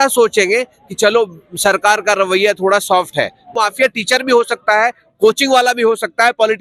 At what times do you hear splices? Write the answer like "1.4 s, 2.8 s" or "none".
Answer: 3.5 s